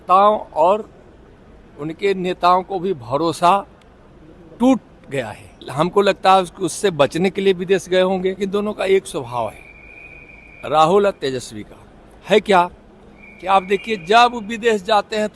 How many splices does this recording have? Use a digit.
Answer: 2